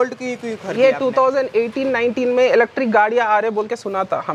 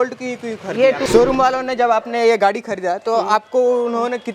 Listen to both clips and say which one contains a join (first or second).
second